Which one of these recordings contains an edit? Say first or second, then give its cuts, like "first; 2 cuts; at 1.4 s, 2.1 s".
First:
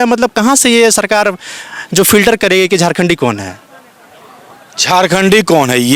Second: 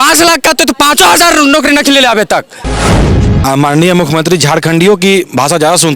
second; 1 cut; at 3.1 s